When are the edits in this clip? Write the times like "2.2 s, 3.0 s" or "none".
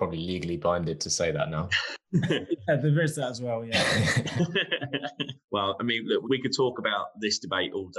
5.3 s, 6.2 s